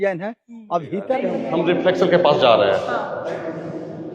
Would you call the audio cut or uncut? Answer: cut